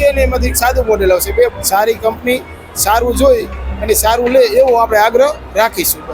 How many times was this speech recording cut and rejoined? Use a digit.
1